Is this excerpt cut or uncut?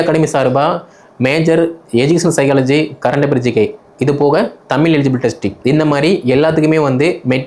uncut